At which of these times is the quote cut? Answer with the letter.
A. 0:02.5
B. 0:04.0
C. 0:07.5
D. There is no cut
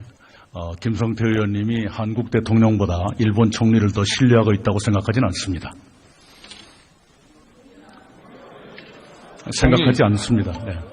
B